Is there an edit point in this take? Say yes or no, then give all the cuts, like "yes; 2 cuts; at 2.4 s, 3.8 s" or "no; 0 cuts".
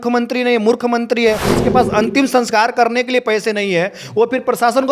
yes; 1 cut; at 1.5 s